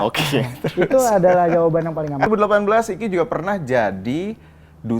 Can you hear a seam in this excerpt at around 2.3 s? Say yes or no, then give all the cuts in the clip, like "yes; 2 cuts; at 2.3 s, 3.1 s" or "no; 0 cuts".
yes; 1 cut; at 2.3 s